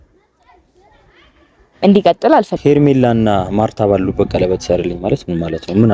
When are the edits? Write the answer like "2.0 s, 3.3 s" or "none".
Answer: 2.6 s